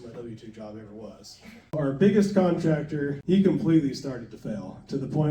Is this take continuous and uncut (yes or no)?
no